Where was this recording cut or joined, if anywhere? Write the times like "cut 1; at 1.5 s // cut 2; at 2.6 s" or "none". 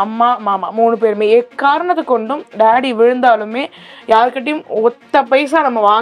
none